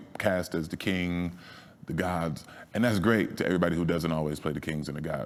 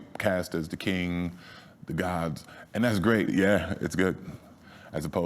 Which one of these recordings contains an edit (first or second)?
second